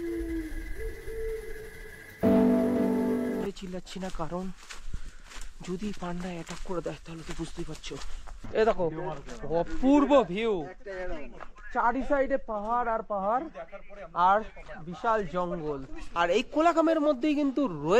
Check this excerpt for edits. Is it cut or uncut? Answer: cut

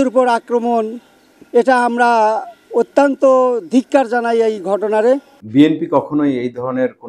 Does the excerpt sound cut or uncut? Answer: cut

